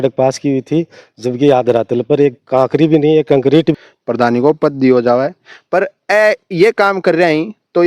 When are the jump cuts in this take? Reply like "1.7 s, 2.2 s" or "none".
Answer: 3.7 s